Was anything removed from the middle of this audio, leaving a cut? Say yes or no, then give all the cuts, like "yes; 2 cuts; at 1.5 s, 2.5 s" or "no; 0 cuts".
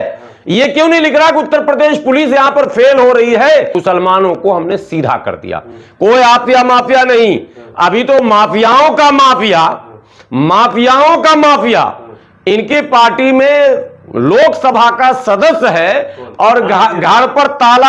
yes; 1 cut; at 3.8 s